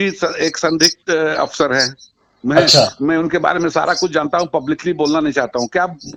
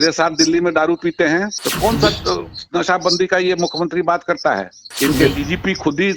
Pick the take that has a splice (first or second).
second